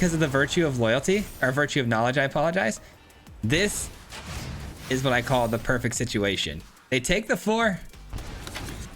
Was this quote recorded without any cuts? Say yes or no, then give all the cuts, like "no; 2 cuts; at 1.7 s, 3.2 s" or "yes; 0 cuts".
no; 1 cut; at 2.9 s